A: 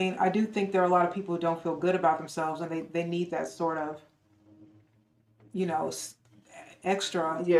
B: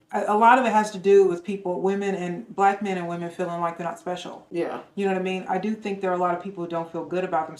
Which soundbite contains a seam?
B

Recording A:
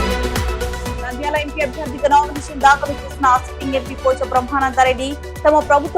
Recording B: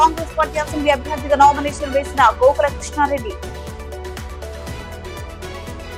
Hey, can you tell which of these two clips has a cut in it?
A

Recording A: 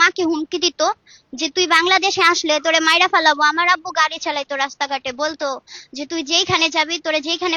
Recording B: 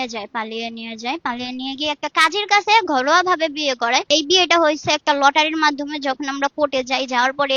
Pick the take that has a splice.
B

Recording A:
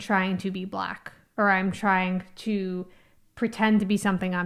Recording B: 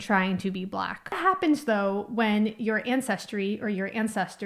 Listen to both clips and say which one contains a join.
B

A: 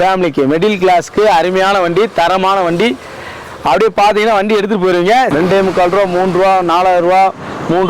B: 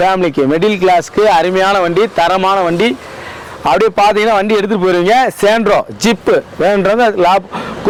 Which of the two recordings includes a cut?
A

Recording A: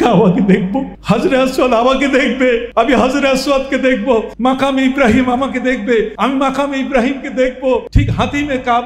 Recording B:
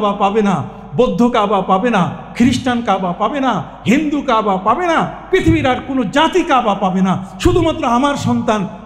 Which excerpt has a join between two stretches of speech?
A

